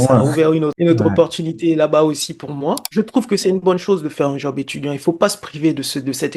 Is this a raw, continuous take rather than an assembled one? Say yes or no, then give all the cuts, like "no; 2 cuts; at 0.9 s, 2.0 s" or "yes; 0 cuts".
no; 1 cut; at 2.8 s